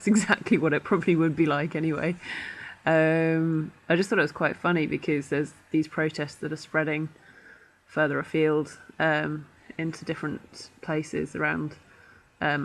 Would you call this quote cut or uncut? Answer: uncut